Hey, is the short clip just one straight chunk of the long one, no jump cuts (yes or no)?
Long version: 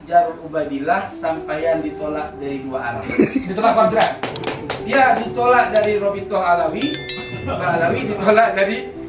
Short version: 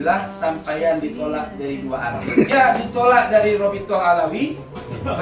no